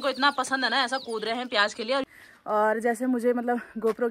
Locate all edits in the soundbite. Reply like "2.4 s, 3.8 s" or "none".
2.0 s